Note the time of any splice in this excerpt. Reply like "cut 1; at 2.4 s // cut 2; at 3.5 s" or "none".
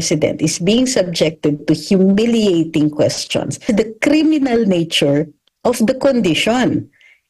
cut 1; at 3.6 s